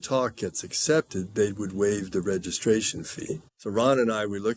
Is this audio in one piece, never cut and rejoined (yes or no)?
no